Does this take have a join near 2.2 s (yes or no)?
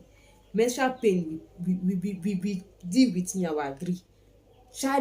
no